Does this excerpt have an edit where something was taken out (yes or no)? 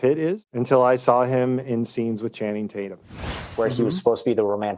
yes